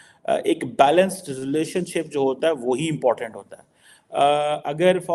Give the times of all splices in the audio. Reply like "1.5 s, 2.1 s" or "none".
none